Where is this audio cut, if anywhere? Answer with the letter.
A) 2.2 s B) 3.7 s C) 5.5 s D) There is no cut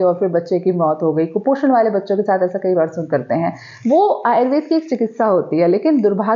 D